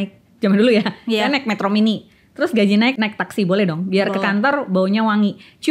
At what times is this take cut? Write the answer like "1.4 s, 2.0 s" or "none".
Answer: 2.9 s